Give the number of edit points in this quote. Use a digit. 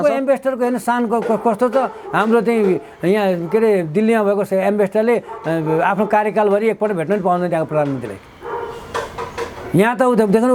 0